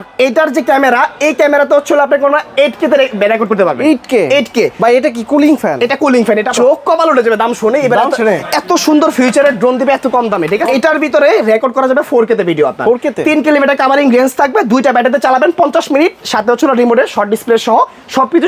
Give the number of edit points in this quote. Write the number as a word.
two